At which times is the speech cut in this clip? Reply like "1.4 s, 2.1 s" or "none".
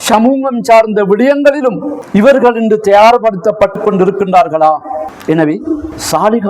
5.0 s